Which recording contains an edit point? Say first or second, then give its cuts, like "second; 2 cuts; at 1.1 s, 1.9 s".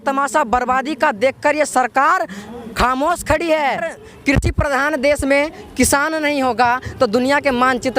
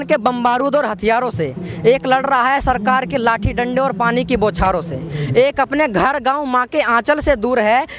first; 1 cut; at 3.9 s